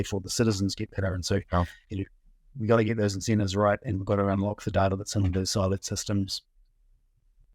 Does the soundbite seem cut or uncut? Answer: uncut